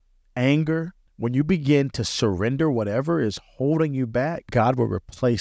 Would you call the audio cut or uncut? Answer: cut